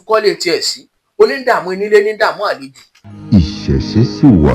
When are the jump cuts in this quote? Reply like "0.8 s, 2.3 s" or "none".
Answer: 3.2 s